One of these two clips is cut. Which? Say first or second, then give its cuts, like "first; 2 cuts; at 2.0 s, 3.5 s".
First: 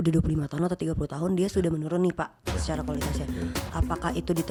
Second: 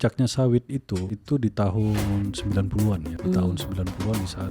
second; 2 cuts; at 1.1 s, 3.1 s